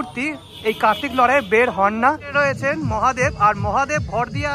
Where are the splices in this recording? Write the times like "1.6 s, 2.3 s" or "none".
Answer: 2.3 s